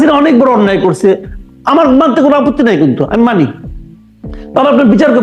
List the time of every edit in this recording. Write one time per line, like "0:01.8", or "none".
none